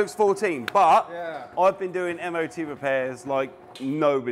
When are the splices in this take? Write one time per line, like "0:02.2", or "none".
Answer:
none